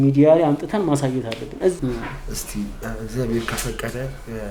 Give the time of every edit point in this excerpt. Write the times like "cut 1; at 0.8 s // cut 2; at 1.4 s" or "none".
cut 1; at 1.8 s